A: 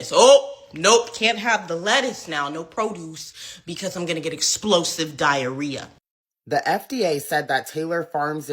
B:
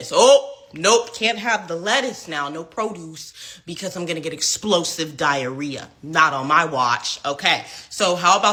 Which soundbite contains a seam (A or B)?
A